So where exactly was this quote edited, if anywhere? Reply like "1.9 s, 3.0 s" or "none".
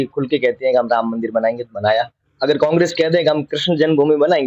none